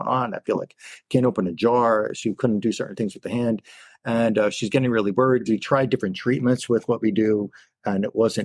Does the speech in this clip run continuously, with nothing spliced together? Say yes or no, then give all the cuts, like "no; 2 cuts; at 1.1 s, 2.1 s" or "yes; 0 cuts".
yes; 0 cuts